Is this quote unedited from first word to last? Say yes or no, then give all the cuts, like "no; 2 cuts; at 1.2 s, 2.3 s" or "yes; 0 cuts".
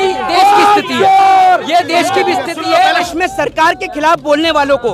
no; 1 cut; at 3.1 s